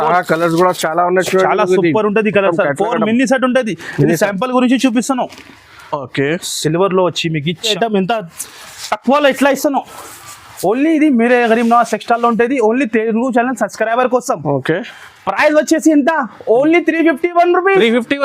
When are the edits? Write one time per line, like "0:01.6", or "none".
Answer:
0:07.7